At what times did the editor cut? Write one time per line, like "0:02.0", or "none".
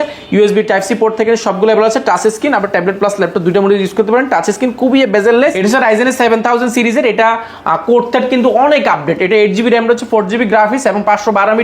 0:05.5

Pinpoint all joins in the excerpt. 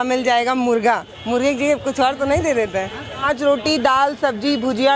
0:01.1
0:03.2

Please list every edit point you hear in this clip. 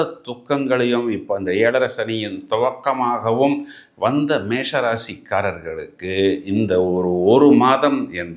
none

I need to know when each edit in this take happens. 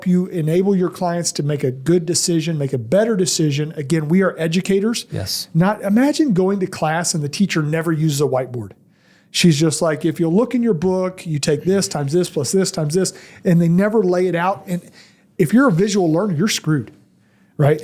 none

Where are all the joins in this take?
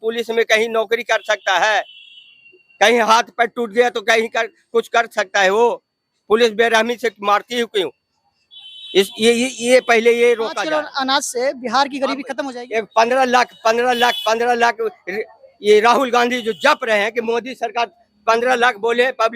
0:10.6
0:12.4

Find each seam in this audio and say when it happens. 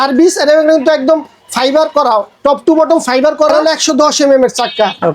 0:03.5

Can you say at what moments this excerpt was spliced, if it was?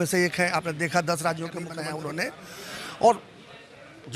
0:01.8

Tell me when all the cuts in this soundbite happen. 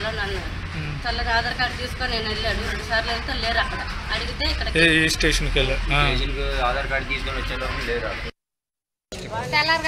0:08.7

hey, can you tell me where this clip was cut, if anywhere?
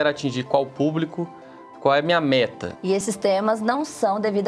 0:02.9

